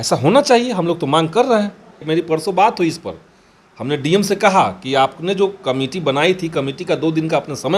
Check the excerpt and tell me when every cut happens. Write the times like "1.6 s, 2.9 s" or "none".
2.0 s